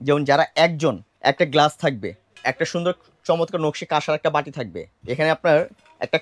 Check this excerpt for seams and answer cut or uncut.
cut